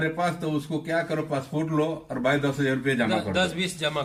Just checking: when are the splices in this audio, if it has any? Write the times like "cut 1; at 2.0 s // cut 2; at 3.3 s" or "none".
none